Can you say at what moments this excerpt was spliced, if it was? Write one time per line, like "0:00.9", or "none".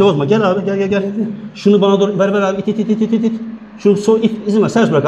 none